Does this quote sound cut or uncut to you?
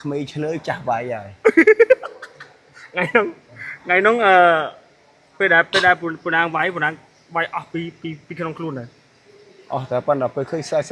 uncut